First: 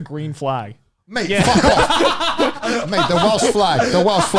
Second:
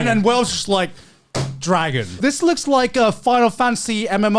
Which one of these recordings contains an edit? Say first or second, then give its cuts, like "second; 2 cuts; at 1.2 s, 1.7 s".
second; 1 cut; at 2.1 s